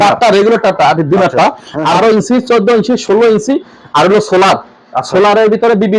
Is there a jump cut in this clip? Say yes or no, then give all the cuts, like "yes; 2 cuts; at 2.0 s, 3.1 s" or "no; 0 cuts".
yes; 1 cut; at 1.9 s